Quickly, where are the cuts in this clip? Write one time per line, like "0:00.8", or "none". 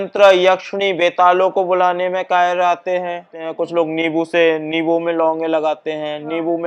0:03.4